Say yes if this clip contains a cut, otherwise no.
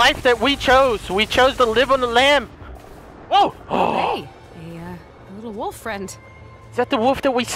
yes